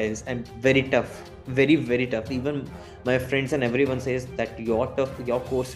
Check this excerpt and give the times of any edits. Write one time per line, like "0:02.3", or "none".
none